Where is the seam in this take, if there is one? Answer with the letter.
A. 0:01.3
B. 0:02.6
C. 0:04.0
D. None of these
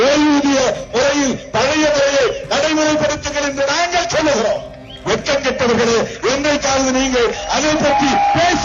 D